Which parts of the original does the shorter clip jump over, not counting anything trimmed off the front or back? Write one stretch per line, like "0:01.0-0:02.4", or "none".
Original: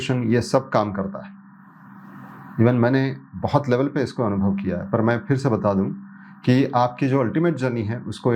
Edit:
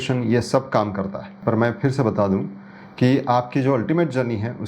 0:01.4-0:04.8